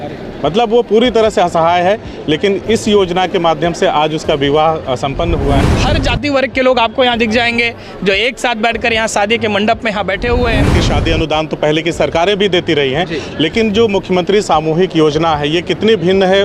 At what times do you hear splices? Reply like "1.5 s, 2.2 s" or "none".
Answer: 5.6 s, 10.8 s